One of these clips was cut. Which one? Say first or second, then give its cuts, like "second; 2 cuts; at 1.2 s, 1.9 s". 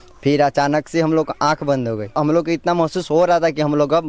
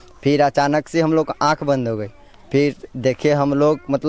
first; 1 cut; at 2.1 s